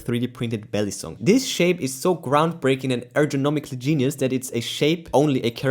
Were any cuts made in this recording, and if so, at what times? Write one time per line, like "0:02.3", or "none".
0:01.1